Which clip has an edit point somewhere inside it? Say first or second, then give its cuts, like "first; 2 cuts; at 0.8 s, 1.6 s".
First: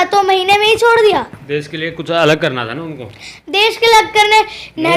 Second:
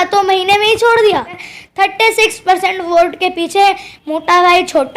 second; 1 cut; at 1.5 s